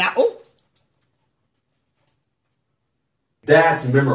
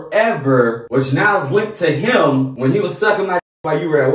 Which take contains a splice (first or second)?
second